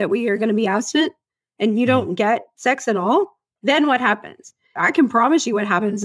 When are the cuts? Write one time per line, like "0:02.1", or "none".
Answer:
0:03.4
0:04.7